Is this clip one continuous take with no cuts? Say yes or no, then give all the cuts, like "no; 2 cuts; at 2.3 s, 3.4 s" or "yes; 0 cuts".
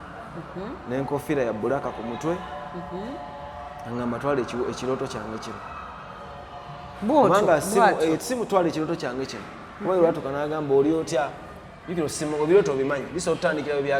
yes; 0 cuts